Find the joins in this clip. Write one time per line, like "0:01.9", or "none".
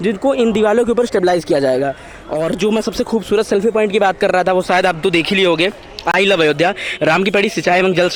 none